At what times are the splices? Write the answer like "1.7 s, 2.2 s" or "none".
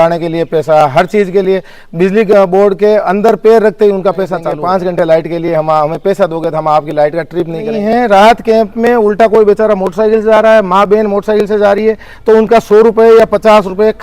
4.5 s, 7.7 s